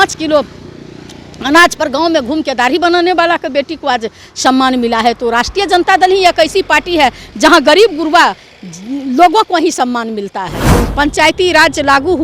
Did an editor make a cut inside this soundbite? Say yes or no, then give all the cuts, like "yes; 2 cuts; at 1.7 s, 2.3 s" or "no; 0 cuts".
yes; 1 cut; at 10.6 s